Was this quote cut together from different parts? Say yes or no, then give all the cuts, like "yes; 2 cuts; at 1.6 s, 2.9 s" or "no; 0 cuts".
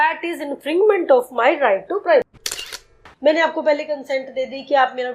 yes; 1 cut; at 2.8 s